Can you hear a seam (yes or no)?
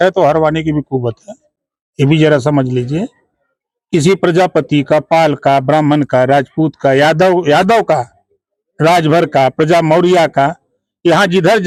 no